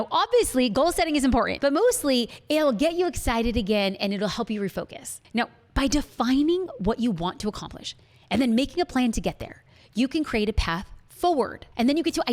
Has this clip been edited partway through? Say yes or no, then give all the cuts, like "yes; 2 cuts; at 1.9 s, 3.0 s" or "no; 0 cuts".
yes; 1 cut; at 1.5 s